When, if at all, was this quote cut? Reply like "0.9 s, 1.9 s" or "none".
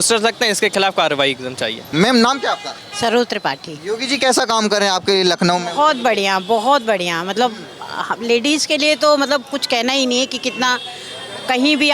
none

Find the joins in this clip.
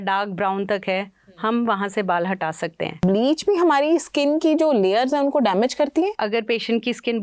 3.0 s, 6.1 s

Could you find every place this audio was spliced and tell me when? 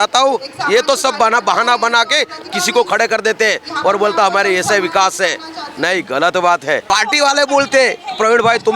6.8 s

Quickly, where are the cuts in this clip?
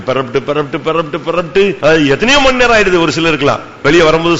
1.8 s

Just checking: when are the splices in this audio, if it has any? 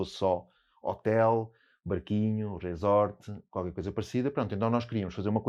none

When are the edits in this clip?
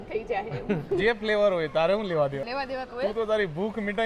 1.0 s, 2.5 s

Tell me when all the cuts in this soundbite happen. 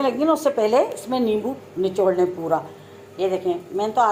none

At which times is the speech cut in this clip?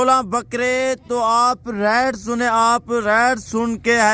none

